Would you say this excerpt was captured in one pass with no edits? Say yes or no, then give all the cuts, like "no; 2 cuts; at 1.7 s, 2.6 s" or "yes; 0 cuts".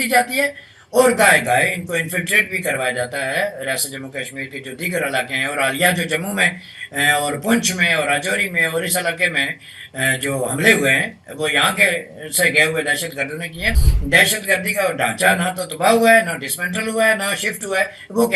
no; 1 cut; at 13.8 s